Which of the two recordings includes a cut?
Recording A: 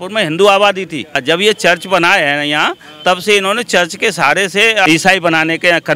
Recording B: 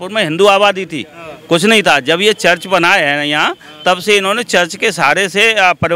A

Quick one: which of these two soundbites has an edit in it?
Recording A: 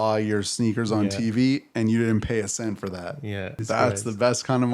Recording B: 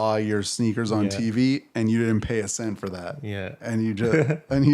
A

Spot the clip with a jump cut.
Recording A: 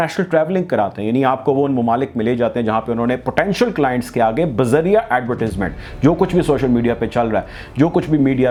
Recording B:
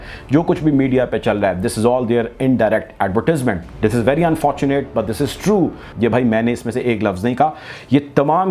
B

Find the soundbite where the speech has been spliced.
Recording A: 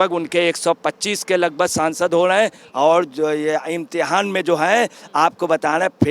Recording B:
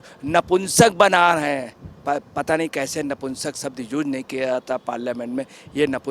A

